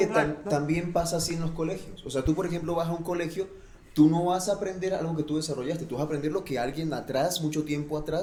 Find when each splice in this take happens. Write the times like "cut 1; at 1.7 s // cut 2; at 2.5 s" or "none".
none